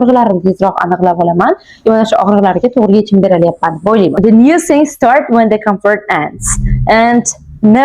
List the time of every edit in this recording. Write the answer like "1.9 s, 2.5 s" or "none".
4.1 s